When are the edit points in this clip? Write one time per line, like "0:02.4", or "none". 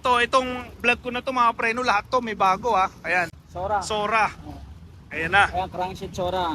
0:03.4